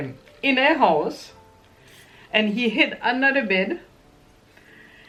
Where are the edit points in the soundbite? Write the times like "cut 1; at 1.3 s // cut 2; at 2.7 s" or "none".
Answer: none